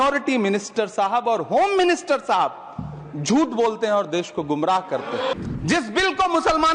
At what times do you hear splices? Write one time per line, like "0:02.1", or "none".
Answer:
0:05.3